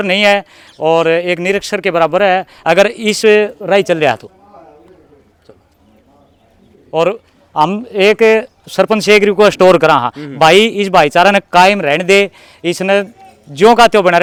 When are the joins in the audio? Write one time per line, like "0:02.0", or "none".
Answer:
none